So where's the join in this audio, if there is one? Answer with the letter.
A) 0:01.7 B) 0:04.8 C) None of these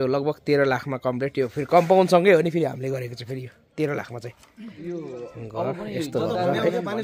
B